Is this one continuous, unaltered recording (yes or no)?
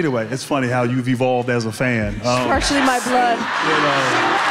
yes